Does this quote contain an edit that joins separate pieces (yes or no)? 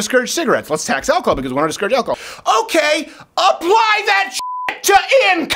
yes